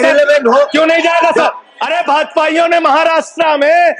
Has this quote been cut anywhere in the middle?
yes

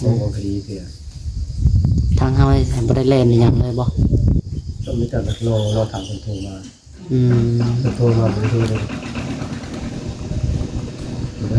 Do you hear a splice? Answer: no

